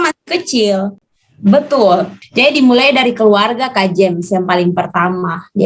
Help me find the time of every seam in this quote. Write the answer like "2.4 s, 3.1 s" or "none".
1.0 s